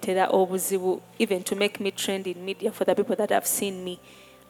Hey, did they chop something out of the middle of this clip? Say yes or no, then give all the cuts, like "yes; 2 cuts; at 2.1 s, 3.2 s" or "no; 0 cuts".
no; 0 cuts